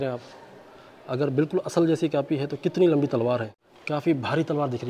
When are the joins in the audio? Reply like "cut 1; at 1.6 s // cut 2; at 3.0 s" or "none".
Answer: cut 1; at 3.9 s